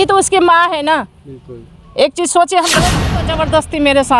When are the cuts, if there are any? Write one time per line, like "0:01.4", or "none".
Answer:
0:03.2